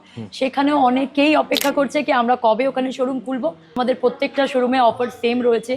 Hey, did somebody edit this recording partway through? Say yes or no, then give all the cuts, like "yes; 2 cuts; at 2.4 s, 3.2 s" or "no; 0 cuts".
yes; 1 cut; at 3.8 s